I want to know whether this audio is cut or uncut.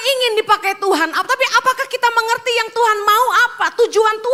uncut